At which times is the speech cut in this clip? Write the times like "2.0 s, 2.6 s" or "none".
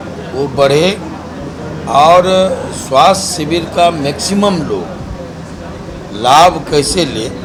none